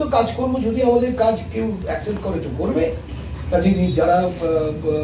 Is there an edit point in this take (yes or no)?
no